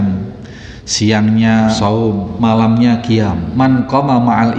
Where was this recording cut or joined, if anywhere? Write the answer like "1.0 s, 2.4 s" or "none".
1.9 s, 3.4 s